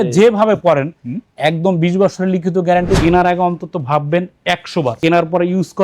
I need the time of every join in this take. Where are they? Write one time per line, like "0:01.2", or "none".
0:03.0